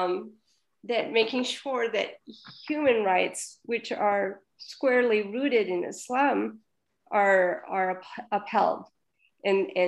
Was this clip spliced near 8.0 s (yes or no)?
no